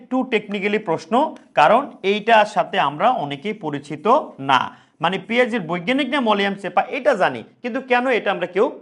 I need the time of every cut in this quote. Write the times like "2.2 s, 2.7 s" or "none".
none